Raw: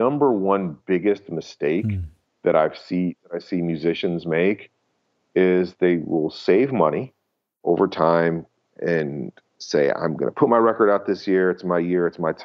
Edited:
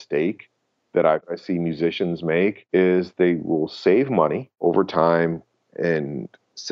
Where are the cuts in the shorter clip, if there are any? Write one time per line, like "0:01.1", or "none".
0:01.3
0:02.6
0:04.5